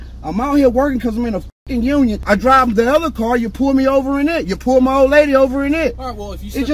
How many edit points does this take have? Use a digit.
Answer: 1